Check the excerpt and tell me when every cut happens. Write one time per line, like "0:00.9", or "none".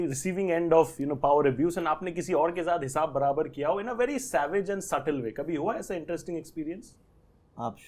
none